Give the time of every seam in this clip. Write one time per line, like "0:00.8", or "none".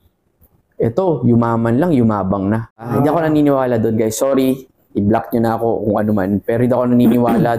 0:02.9